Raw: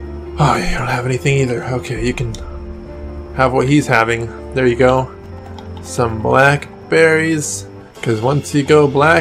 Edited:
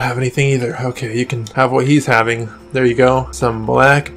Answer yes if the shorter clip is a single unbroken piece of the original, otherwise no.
no